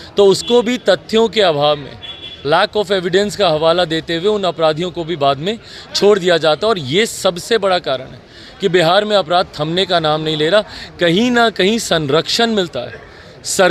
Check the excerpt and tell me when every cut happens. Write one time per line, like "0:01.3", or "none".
none